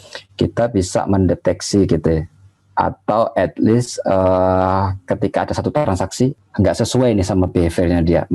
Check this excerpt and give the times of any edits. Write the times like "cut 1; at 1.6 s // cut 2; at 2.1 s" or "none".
cut 1; at 6.4 s